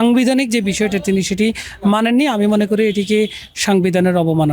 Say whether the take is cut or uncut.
uncut